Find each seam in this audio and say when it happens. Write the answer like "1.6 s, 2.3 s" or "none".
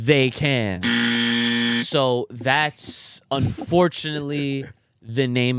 none